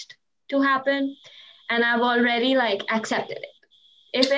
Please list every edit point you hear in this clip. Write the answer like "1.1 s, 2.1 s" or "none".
none